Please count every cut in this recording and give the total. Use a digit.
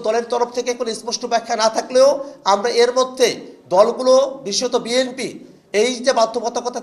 0